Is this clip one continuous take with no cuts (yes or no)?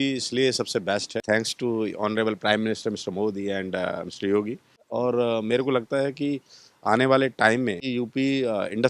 no